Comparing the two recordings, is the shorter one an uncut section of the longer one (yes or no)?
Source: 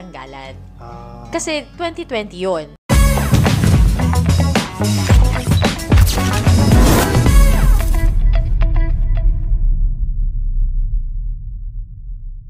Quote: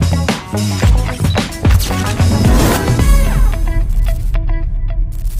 yes